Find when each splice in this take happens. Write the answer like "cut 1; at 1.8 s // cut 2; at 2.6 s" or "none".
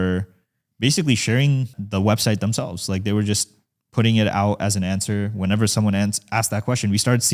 cut 1; at 1.8 s